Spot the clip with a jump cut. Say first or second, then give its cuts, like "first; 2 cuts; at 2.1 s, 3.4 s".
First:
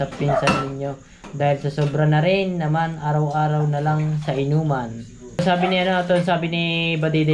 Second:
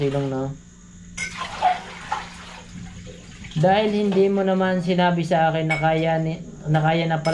first; 1 cut; at 5.4 s